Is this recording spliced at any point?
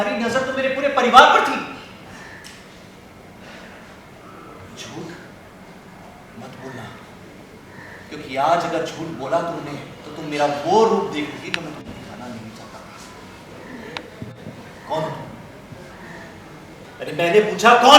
yes; 1 cut; at 16.8 s

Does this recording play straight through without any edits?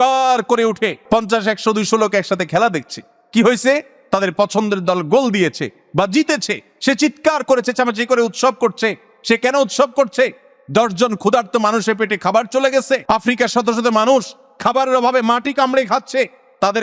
no; 2 cuts; at 1.0 s, 13.0 s

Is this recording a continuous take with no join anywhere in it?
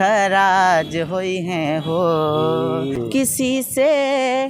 no; 1 cut; at 3.0 s

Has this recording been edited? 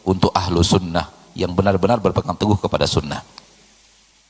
no; 0 cuts

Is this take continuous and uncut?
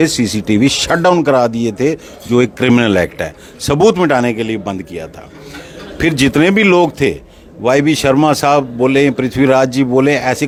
yes; 0 cuts

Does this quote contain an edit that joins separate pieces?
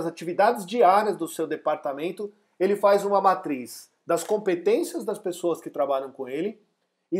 no; 0 cuts

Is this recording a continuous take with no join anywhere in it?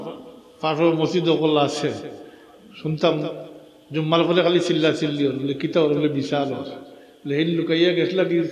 yes; 0 cuts

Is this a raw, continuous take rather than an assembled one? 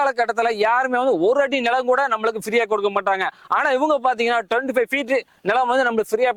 yes; 0 cuts

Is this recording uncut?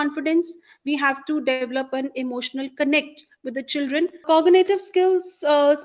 no; 1 cut; at 4.2 s

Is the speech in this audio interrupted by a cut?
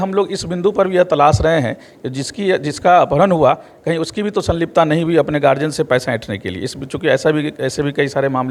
no; 0 cuts

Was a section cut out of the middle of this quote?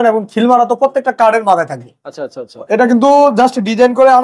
no; 0 cuts

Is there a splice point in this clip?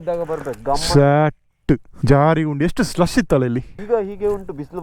yes; 2 cuts; at 1.9 s, 3.7 s

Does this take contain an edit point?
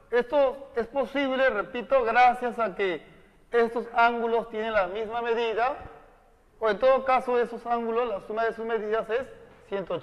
yes; 1 cut; at 5.9 s

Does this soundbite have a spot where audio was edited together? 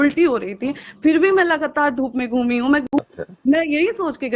yes; 1 cut; at 2.8 s

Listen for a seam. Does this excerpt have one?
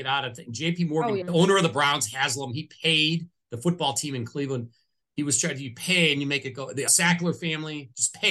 yes; 2 cuts; at 1.2 s, 6.9 s

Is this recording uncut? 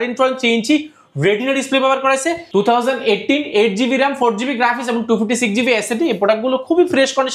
no; 1 cut; at 2.4 s

